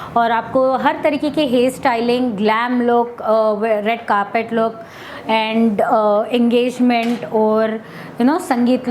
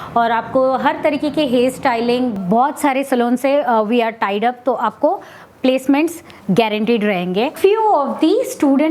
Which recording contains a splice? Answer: second; 2 cuts; at 2.4 s, 7.5 s

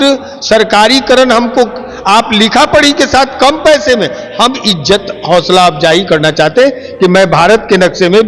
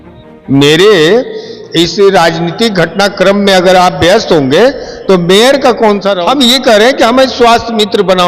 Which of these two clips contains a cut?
second; 1 cut; at 6.1 s

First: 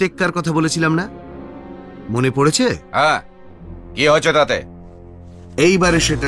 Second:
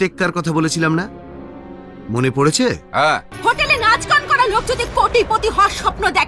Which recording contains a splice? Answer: second; 1 cut; at 3.3 s

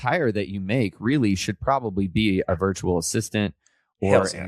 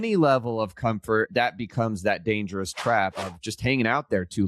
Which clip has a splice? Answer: second; 2 cuts; at 1.3 s, 3.2 s

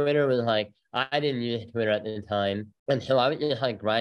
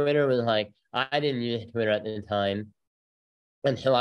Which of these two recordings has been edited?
first; 1 cut; at 2.7 s

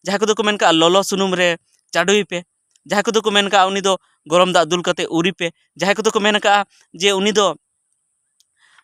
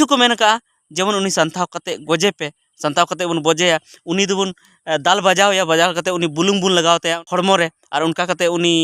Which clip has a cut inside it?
second; 1 cut; at 7.2 s

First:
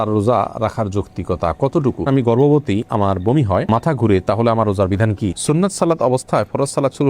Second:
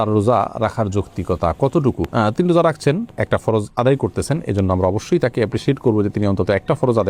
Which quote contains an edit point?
first; 2 cuts; at 2.0 s, 5.4 s

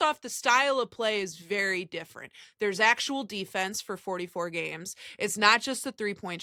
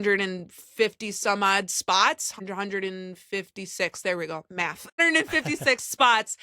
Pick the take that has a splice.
second; 2 cuts; at 2.4 s, 4.9 s

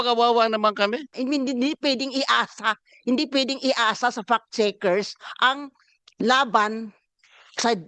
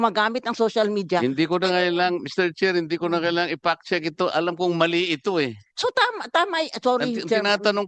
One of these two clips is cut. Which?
first; 1 cut; at 1.1 s

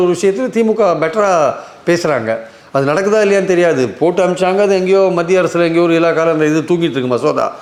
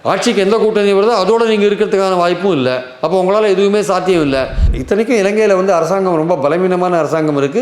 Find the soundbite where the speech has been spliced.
second; 1 cut; at 4.7 s

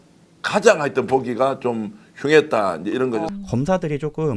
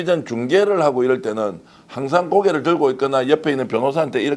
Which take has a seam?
first; 1 cut; at 3.3 s

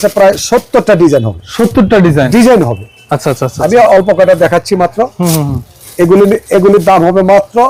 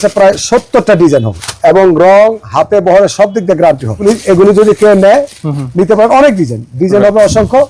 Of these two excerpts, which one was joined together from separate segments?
second; 2 cuts; at 1.4 s, 4.0 s

